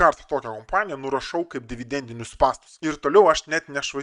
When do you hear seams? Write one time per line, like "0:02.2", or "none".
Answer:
0:02.7